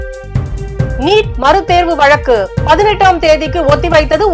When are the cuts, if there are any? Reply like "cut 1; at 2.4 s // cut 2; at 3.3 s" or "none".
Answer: cut 1; at 1.0 s

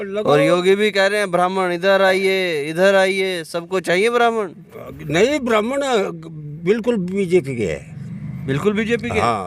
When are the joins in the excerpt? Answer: none

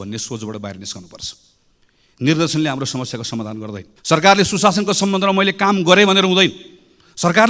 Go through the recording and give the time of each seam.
cut 1; at 3.9 s

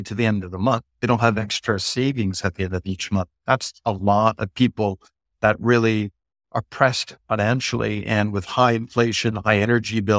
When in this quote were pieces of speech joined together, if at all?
cut 1; at 1.0 s

